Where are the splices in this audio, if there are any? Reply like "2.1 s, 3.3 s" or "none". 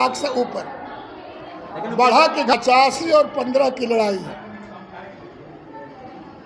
2.5 s